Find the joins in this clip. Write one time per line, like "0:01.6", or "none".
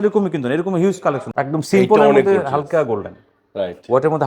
0:01.2